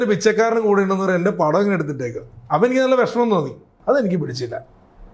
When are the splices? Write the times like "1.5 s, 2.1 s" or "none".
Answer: 3.7 s